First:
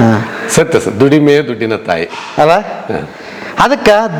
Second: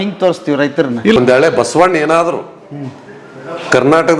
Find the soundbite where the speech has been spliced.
second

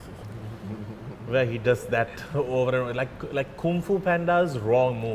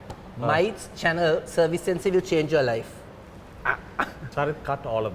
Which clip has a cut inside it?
second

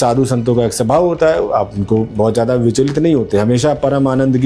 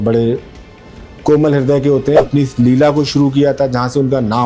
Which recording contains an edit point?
second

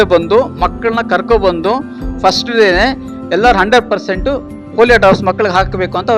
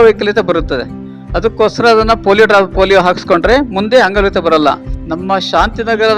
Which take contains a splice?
second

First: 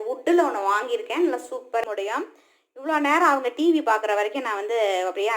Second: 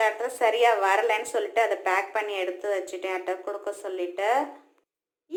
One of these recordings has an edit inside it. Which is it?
first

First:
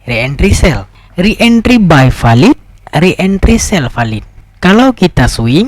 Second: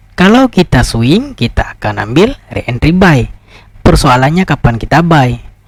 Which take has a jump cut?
first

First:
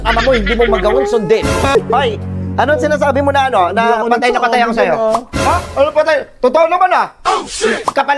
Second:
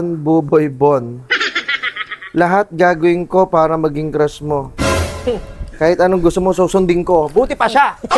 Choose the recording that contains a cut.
first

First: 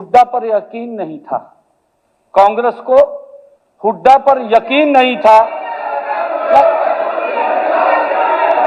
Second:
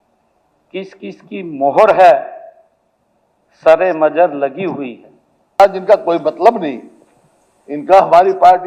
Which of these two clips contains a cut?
second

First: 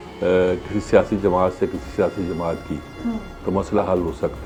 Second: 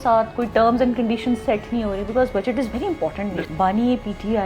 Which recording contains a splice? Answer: second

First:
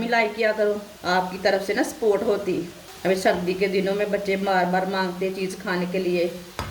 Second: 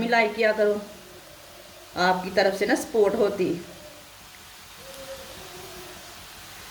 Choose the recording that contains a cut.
first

